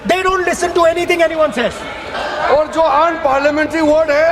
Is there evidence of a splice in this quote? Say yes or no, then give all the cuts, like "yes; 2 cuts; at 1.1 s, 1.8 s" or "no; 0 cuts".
yes; 1 cut; at 2.2 s